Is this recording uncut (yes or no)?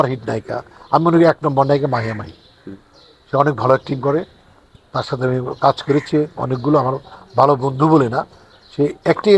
yes